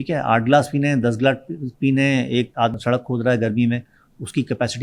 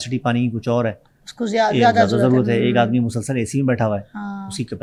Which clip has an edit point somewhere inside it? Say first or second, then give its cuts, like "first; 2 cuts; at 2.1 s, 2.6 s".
first; 1 cut; at 2.7 s